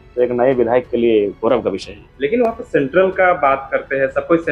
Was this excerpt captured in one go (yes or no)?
yes